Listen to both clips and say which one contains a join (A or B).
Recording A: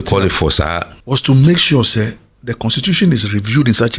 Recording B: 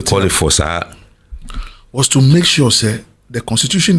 A